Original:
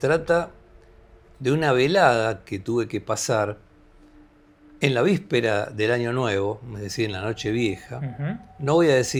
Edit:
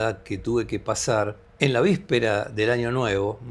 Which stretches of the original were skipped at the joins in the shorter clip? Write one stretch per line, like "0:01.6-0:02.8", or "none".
0:03.6-0:04.6